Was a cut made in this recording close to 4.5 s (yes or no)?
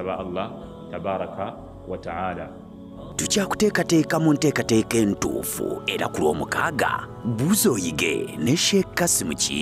no